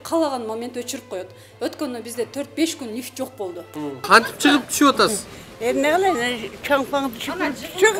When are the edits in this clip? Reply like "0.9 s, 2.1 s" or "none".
4.0 s